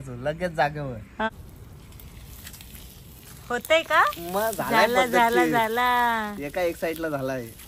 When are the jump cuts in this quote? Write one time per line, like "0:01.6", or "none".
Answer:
0:01.3